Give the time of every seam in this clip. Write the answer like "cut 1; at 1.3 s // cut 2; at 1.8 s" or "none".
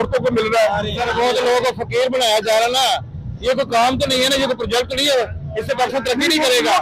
none